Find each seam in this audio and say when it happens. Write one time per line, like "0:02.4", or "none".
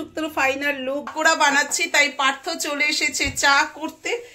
0:01.1